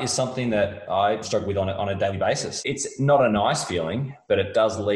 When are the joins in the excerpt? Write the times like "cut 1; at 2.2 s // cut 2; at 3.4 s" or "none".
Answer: cut 1; at 1.2 s // cut 2; at 2.5 s